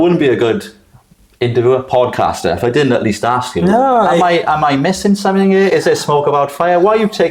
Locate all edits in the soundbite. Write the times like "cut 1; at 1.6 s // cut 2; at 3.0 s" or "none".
none